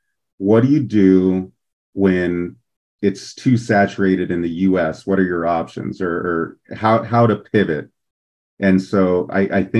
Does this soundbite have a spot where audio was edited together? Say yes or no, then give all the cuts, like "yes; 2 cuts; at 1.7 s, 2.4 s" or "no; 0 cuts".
no; 0 cuts